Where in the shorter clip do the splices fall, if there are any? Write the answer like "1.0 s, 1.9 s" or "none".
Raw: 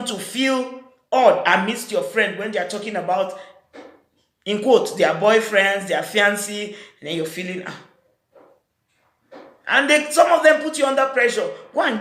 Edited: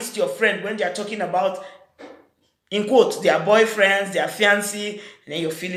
none